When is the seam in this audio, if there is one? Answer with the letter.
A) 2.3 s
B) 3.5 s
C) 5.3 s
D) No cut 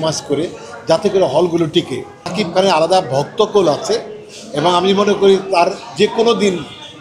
A